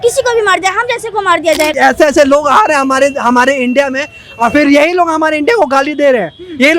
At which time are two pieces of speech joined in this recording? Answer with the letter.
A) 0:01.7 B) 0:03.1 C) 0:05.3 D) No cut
A